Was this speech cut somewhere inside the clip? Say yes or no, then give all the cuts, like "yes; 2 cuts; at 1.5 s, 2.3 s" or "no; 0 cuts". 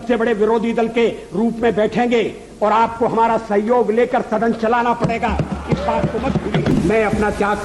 yes; 1 cut; at 6.7 s